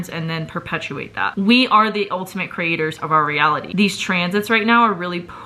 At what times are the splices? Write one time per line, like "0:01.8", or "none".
0:01.3
0:03.7